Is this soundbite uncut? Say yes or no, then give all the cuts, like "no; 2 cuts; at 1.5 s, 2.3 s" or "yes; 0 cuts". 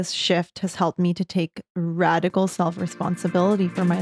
yes; 0 cuts